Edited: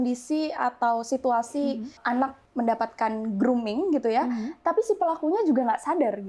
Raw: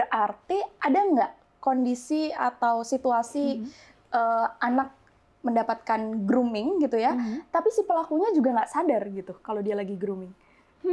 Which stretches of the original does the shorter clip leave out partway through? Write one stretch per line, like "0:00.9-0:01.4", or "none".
0:03.9-0:05.0